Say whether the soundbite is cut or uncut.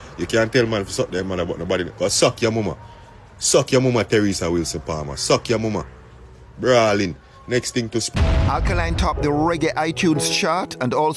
cut